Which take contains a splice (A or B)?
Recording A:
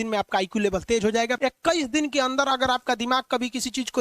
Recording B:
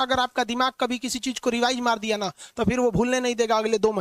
A